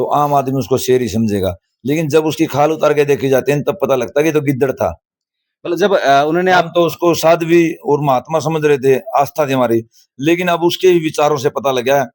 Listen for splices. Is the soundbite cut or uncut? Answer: uncut